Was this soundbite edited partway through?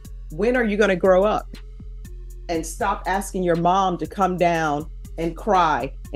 no; 0 cuts

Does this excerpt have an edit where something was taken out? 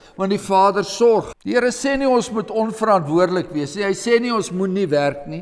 yes; 1 cut; at 1.3 s

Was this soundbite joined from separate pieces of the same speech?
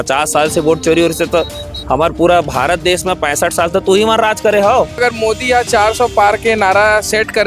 yes; 1 cut; at 5.0 s

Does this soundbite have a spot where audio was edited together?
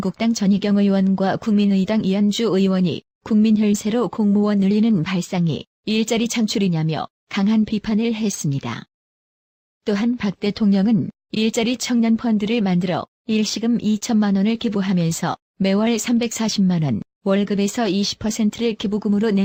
no; 0 cuts

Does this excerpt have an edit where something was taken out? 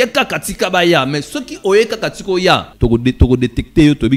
yes; 1 cut; at 2.7 s

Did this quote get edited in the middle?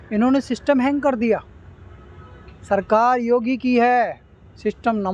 no; 0 cuts

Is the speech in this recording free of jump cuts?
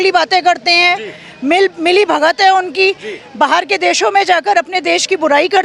yes; 0 cuts

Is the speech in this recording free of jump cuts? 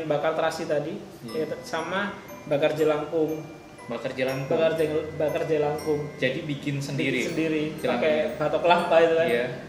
yes; 0 cuts

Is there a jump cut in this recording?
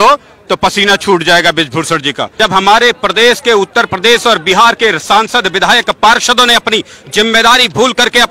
yes; 1 cut; at 2.4 s

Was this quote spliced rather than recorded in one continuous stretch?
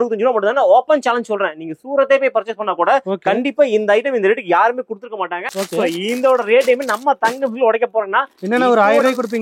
yes; 1 cut; at 5.4 s

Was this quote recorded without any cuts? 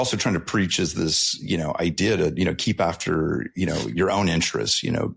yes; 0 cuts

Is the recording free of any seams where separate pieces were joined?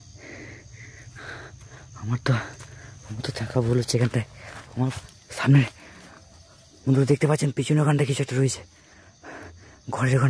no; 1 cut; at 5.1 s

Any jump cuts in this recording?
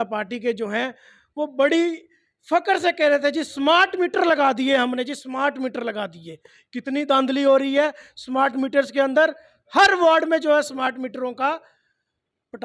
no; 0 cuts

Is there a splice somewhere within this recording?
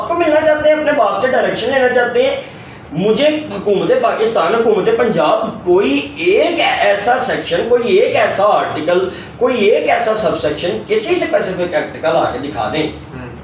no; 0 cuts

